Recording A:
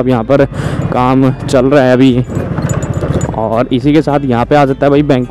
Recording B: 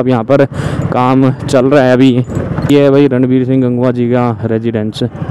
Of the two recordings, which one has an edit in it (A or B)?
B